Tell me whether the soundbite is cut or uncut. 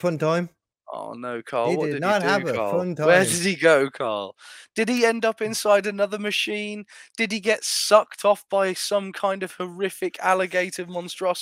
uncut